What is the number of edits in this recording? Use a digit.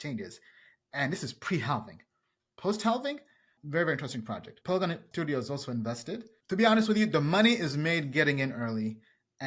0